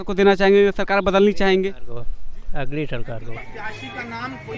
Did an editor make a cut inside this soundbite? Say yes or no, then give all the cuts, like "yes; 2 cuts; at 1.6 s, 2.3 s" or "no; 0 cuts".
yes; 1 cut; at 3.4 s